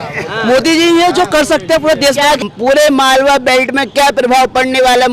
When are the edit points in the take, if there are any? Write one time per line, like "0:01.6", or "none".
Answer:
0:02.4

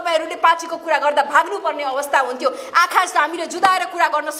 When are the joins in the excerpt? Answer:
none

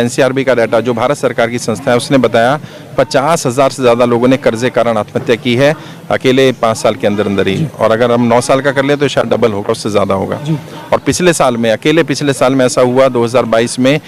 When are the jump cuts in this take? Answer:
none

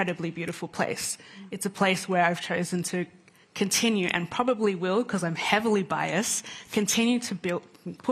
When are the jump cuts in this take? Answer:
none

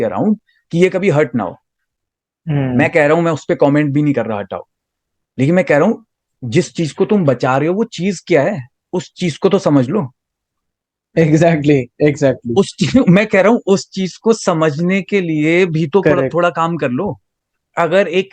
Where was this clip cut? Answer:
0:17.2

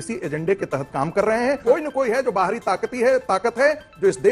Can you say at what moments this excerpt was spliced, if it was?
0:01.6

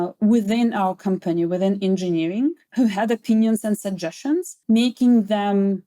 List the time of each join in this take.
0:02.6
0:04.5

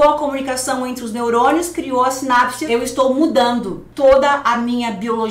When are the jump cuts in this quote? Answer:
0:02.6
0:03.8

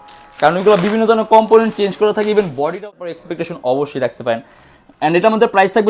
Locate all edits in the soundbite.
0:03.2

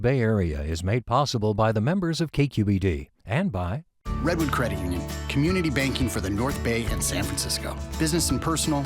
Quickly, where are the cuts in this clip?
0:03.9

